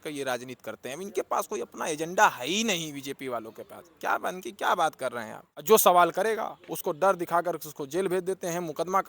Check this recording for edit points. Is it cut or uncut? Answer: cut